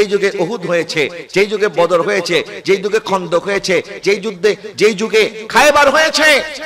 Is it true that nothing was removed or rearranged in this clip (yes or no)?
yes